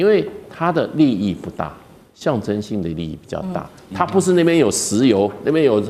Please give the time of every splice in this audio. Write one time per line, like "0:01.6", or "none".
none